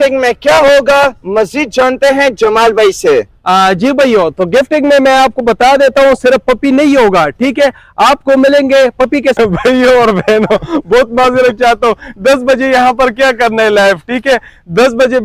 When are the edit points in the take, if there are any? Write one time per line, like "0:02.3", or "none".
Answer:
0:09.4